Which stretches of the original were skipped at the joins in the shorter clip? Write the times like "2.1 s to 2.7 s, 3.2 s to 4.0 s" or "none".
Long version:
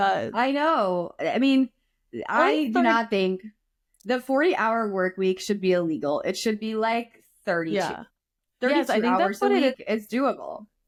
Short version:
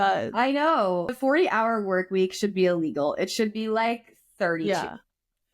1.1 s to 4.2 s

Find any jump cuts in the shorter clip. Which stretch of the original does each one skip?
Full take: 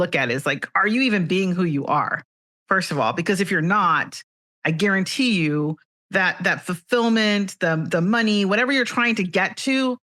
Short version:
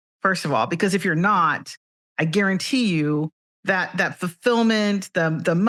none

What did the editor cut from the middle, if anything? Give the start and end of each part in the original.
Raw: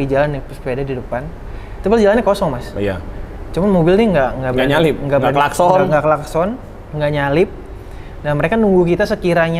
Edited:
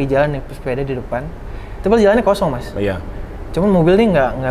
none

